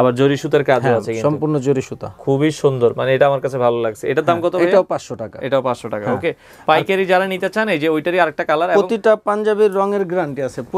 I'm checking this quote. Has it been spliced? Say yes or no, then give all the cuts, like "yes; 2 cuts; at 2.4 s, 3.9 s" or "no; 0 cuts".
no; 0 cuts